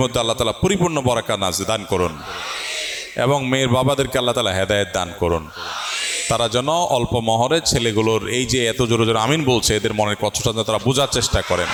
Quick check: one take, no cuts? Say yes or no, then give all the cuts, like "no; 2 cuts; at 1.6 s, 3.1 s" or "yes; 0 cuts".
yes; 0 cuts